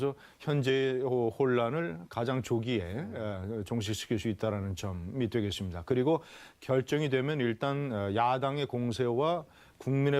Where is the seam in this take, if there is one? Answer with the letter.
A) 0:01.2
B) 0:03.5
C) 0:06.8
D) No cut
A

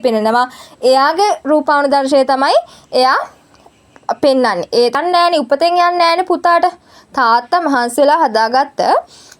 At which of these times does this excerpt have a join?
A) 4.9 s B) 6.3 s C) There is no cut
A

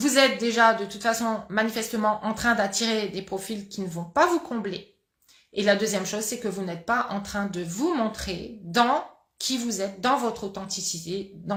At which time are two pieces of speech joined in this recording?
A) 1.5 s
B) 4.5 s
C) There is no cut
C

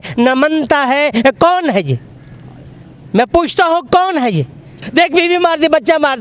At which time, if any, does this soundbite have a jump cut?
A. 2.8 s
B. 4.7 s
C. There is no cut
B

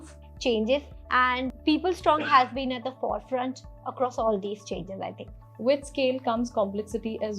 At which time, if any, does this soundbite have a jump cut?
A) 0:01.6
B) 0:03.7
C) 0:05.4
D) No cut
C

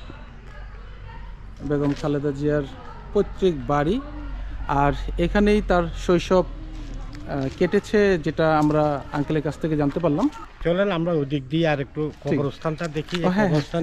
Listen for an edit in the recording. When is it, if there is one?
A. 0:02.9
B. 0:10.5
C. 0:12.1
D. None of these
B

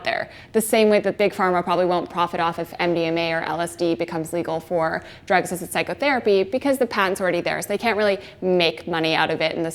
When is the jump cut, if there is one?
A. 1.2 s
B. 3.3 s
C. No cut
A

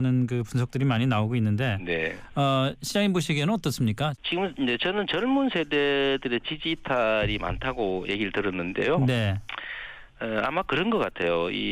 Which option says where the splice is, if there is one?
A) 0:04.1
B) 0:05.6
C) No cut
A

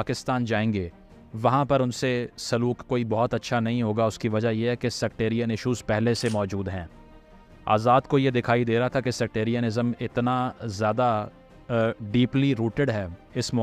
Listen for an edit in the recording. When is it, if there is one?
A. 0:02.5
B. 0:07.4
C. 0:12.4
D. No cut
D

